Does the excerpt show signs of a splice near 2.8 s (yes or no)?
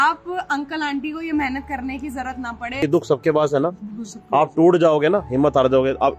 yes